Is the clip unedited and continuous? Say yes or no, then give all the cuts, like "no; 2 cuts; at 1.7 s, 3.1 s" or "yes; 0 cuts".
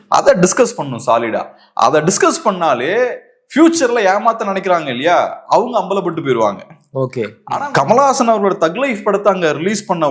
no; 1 cut; at 7.4 s